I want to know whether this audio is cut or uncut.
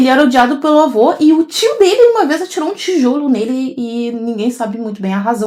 uncut